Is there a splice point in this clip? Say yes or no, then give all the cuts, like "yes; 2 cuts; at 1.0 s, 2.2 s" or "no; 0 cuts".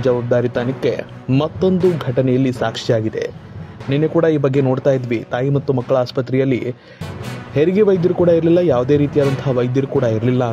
yes; 1 cut; at 3.5 s